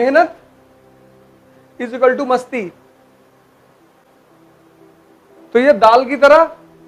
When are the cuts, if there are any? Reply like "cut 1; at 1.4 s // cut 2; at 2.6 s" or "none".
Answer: none